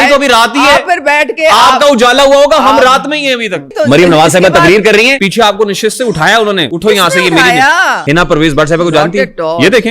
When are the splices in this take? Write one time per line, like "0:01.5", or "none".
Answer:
0:03.7
0:05.2
0:06.7
0:08.0

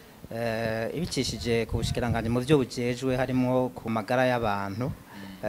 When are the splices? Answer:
0:03.9

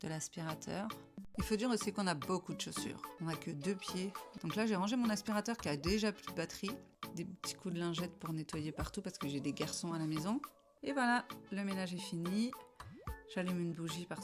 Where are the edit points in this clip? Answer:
0:01.3
0:03.1
0:04.3
0:07.0
0:10.6

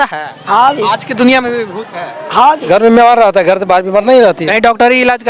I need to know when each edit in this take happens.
0:02.6

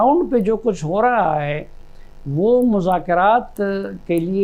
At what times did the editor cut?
none

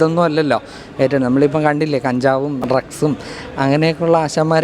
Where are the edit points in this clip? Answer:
0:02.6

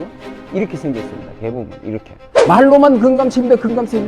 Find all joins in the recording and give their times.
0:02.1

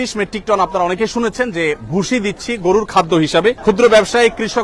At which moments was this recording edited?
0:03.6

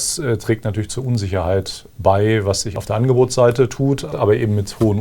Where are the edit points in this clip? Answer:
0:02.7
0:04.1

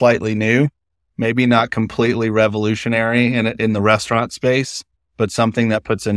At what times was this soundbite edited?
none

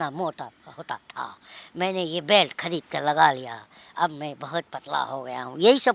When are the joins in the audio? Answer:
none

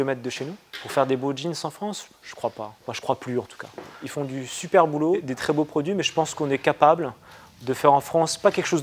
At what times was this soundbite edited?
none

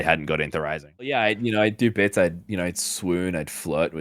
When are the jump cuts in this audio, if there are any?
0:01.2

